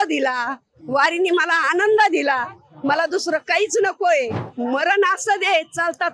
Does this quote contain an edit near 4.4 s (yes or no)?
yes